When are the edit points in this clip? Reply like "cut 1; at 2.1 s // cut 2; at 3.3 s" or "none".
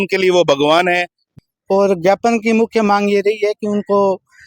cut 1; at 1.2 s